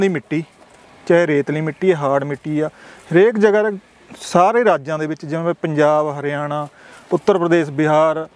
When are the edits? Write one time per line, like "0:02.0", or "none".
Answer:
none